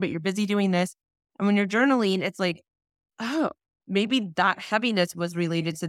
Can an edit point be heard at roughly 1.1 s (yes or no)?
no